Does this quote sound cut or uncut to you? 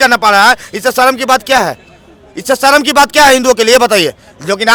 uncut